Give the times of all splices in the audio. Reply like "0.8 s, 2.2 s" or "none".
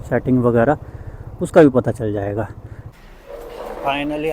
2.9 s